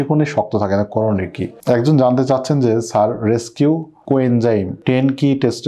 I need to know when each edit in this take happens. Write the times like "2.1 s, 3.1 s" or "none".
1.5 s